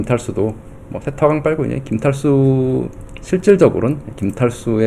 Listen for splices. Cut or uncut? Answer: uncut